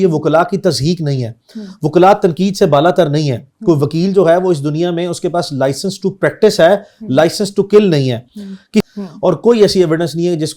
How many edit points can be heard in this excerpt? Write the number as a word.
one